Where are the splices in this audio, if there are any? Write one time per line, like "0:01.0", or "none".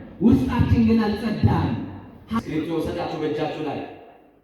0:02.4